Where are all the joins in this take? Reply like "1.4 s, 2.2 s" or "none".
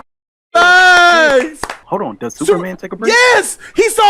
1.8 s

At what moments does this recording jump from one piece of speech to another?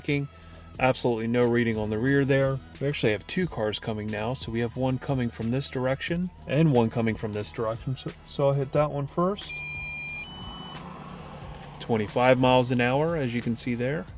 2.7 s, 6.4 s

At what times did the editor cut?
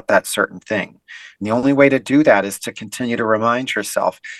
none

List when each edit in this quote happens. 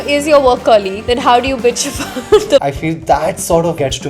2.6 s

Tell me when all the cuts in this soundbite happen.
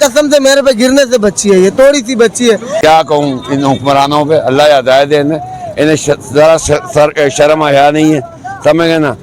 2.7 s

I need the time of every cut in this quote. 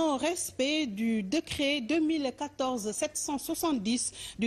3.1 s

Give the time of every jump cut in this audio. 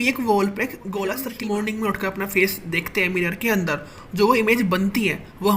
1.3 s

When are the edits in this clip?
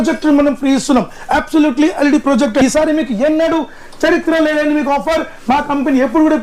2.6 s

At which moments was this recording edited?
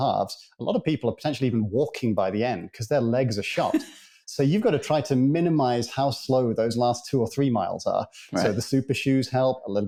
none

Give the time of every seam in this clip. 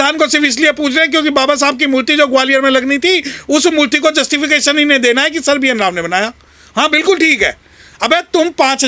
none

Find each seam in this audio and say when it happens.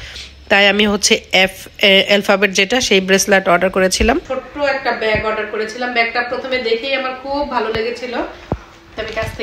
4.4 s

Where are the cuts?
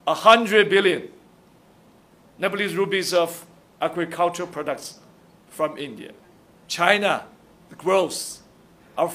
6.6 s

